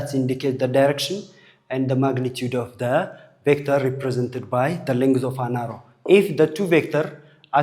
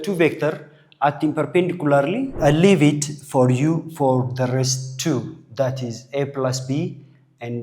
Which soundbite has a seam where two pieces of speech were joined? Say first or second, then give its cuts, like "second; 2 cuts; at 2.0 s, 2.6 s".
second; 1 cut; at 2.4 s